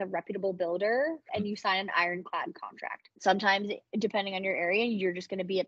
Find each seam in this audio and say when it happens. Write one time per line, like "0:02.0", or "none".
0:01.3
0:03.1